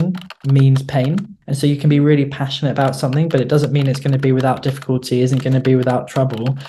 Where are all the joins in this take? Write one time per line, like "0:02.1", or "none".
none